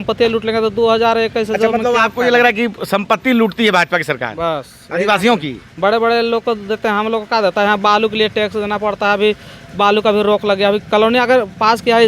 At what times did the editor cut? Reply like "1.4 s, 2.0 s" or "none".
none